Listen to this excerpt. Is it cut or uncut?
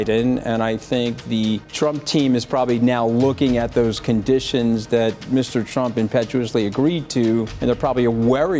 cut